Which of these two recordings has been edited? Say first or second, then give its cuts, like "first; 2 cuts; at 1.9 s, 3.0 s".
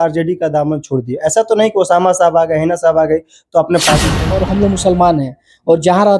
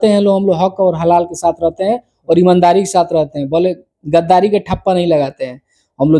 first; 1 cut; at 4.2 s